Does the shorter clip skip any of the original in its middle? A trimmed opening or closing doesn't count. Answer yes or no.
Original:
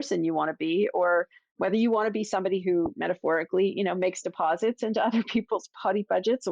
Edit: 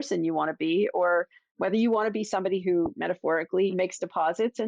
yes